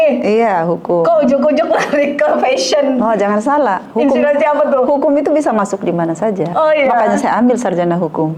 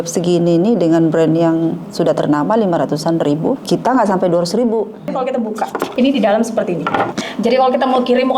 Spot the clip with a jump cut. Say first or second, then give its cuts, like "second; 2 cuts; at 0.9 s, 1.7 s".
second; 3 cuts; at 3.6 s, 5.4 s, 7.2 s